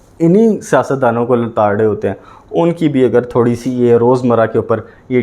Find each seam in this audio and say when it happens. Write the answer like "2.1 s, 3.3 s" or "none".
none